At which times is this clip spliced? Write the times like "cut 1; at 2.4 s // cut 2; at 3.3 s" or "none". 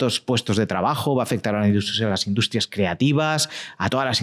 none

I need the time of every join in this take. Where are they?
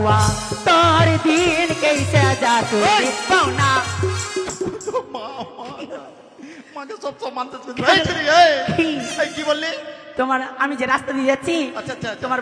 none

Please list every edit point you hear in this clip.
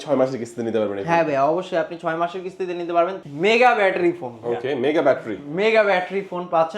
cut 1; at 3.3 s

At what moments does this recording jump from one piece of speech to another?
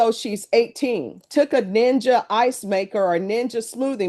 cut 1; at 1.2 s

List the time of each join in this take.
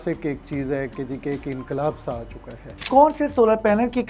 none

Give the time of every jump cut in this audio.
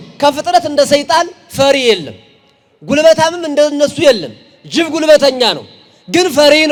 none

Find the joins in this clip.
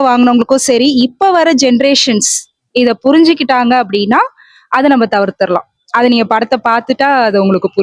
none

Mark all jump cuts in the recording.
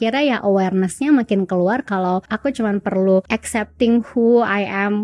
cut 1; at 2.3 s // cut 2; at 3.3 s

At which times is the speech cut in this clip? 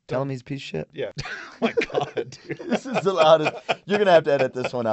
cut 1; at 1.2 s

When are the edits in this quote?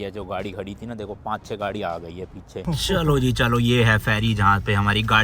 cut 1; at 2.6 s

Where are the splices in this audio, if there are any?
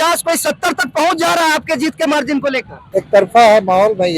cut 1; at 2.8 s

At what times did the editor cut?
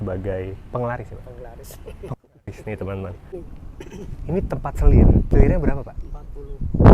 cut 1; at 3.3 s // cut 2; at 5.3 s

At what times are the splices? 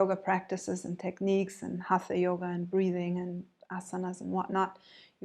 none

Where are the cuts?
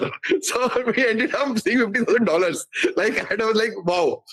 none

